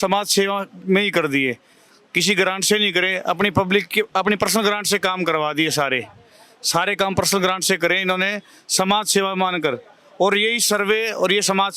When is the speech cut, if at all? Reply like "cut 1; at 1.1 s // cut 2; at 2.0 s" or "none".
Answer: none